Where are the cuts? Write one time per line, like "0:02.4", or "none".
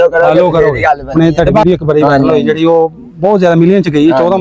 0:01.1